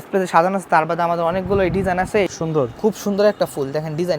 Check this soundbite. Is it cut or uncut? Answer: cut